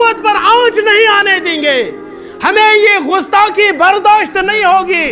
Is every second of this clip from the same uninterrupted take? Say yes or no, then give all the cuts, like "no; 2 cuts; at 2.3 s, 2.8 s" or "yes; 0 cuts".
yes; 0 cuts